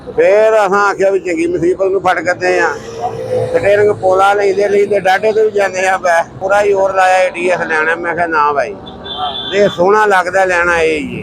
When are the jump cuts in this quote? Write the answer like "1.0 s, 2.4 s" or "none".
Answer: 6.4 s